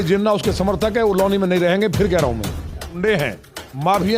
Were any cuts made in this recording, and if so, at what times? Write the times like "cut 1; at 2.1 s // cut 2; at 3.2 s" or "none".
cut 1; at 3.0 s